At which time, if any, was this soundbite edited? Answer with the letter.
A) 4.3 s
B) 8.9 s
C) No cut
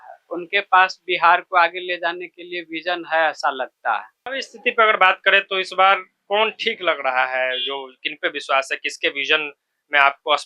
A